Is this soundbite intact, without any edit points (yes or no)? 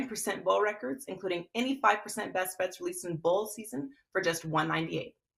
yes